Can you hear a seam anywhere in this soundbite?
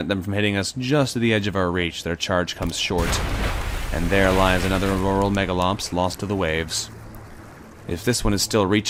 no; 0 cuts

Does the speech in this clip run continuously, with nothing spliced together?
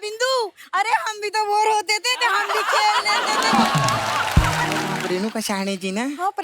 no; 1 cut; at 5.0 s

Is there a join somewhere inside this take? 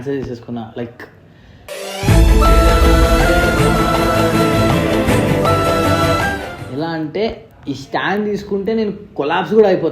no; 0 cuts

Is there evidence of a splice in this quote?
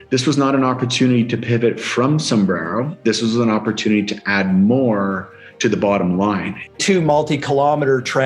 yes; 1 cut; at 6.7 s

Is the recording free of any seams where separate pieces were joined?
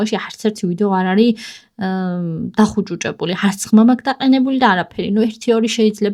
yes; 0 cuts

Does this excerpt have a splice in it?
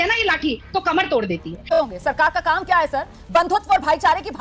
yes; 1 cut; at 1.7 s

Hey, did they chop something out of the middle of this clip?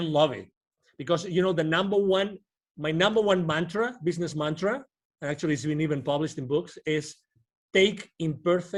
no; 0 cuts

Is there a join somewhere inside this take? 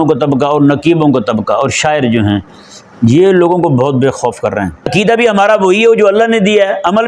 yes; 1 cut; at 4.9 s

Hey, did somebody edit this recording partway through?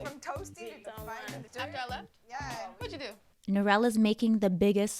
yes; 1 cut; at 3.3 s

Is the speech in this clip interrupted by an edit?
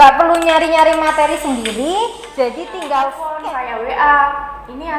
yes; 1 cut; at 3.3 s

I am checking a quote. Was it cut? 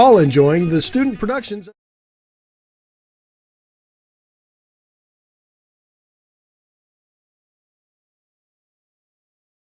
no; 0 cuts

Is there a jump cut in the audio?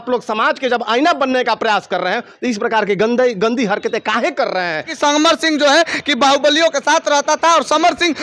yes; 1 cut; at 4.9 s

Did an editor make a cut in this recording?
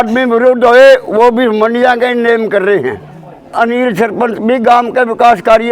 yes; 1 cut; at 3.5 s

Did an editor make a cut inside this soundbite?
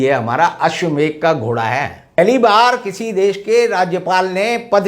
yes; 1 cut; at 2.2 s

